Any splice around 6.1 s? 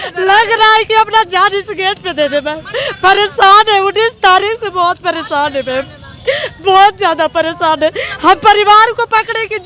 no; 0 cuts

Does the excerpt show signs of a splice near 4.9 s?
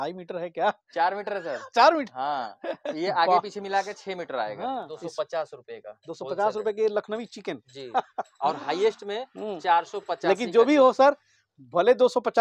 yes; 1 cut; at 4.9 s

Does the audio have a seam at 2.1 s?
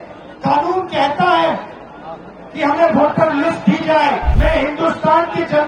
no; 1 cut; at 4.3 s

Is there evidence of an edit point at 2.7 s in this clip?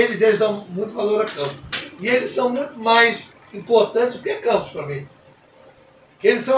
no; 0 cuts

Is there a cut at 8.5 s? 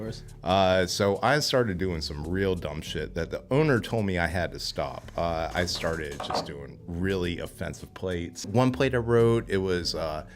yes; 1 cut; at 8.5 s

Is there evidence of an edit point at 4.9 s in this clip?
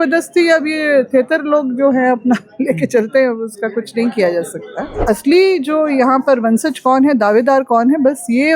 yes; 1 cut; at 4.9 s

